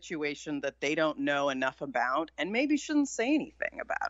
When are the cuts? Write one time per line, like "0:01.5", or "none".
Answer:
none